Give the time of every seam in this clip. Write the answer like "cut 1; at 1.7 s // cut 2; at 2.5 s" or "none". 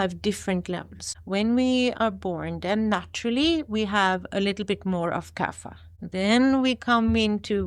none